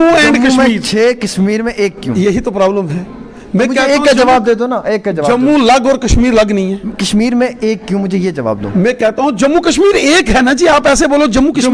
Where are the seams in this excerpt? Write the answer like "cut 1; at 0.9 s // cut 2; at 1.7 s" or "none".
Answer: none